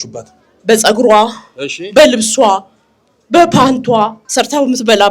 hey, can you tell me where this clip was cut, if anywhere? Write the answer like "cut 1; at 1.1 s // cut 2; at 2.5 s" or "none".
cut 1; at 4.2 s